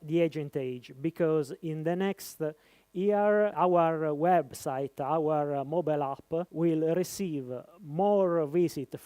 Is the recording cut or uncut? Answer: cut